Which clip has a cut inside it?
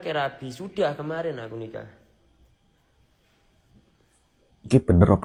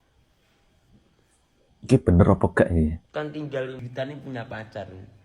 second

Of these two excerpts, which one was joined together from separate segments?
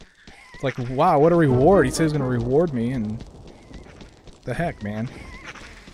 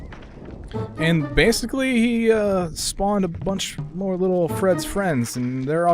second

